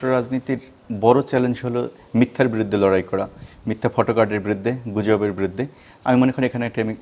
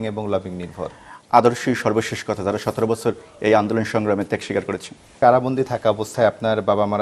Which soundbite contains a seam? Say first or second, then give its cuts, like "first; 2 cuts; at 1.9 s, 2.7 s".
second; 2 cuts; at 1.1 s, 5.1 s